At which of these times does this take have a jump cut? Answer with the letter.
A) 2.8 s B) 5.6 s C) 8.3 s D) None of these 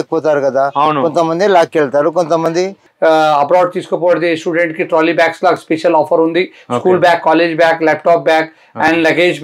A